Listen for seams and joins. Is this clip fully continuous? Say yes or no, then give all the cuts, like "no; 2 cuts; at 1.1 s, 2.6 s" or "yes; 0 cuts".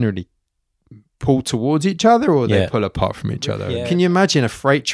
no; 1 cut; at 3.7 s